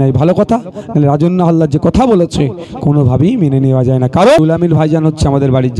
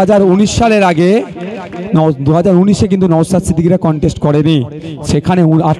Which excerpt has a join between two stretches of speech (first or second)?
first